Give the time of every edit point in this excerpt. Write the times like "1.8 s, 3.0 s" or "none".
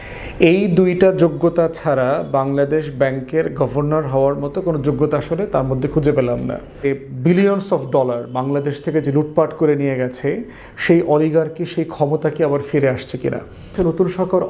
6.9 s, 13.7 s